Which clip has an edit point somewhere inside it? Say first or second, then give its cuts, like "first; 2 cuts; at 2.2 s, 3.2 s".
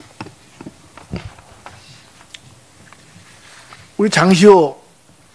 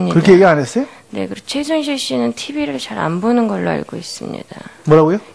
second; 1 cut; at 1.9 s